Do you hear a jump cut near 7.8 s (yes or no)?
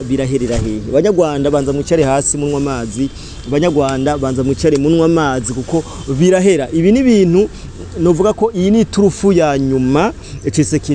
no